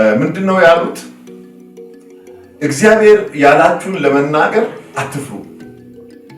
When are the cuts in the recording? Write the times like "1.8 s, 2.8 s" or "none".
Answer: 1.0 s, 2.5 s